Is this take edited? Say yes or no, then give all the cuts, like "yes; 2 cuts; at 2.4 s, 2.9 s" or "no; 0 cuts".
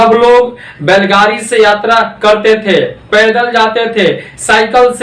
no; 0 cuts